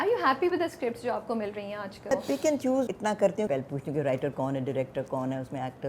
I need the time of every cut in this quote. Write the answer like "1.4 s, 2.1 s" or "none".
2.1 s, 3.4 s